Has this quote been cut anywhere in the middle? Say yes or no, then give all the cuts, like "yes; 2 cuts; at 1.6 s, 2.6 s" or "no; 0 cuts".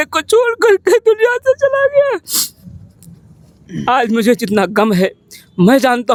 no; 0 cuts